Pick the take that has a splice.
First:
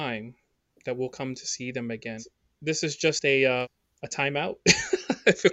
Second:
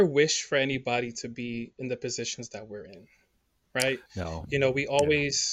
first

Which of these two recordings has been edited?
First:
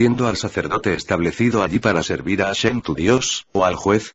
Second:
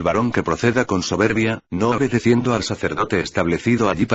first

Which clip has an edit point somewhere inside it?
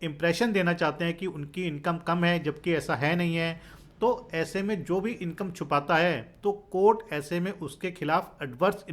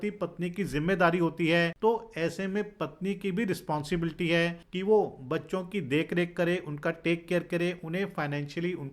second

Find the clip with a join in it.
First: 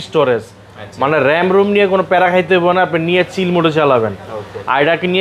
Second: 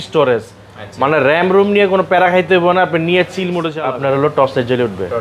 second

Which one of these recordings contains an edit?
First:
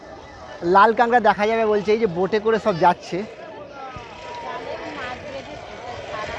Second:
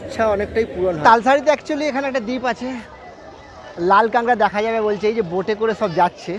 second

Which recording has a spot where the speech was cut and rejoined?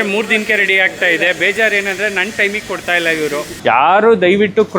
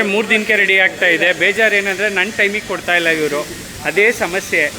first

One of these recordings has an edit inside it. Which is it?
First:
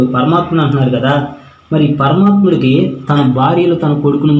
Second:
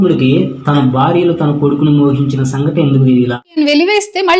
second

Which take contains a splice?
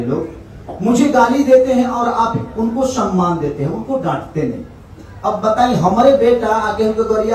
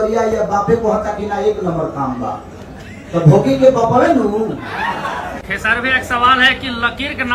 second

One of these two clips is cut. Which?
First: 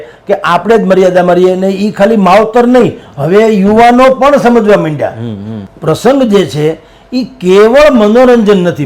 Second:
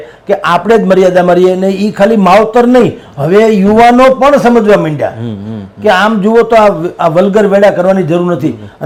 first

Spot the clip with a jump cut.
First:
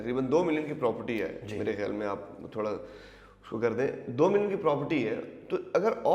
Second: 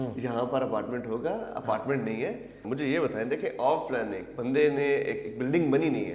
second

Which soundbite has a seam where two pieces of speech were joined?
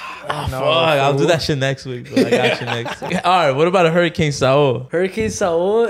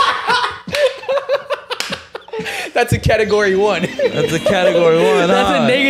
first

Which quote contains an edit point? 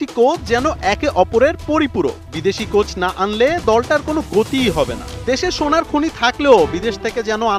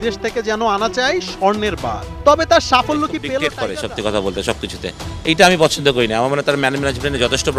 second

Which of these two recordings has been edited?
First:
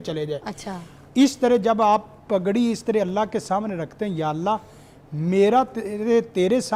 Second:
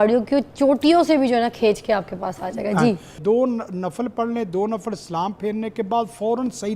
second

